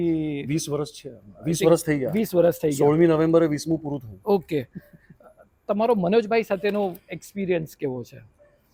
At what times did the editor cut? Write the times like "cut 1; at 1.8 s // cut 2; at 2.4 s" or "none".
none